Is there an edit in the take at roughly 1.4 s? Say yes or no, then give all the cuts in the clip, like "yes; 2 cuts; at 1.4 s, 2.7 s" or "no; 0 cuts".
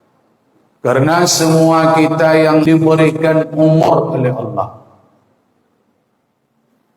no; 1 cut; at 2.6 s